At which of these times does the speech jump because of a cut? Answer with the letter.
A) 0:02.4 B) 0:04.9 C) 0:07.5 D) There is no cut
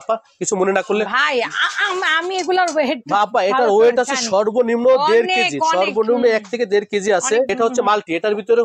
C